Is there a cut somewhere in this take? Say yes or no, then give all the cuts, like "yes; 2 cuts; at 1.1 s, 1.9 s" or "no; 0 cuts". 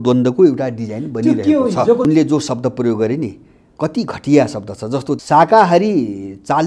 yes; 2 cuts; at 2.0 s, 5.2 s